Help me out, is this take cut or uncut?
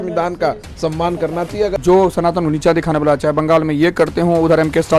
cut